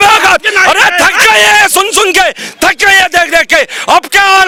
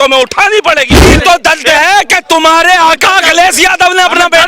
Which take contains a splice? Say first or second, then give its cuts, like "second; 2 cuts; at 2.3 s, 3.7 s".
second; 1 cut; at 1.0 s